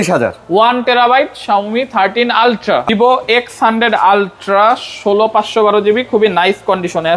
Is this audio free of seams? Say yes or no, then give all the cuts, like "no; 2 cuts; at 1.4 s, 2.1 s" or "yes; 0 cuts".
no; 1 cut; at 2.9 s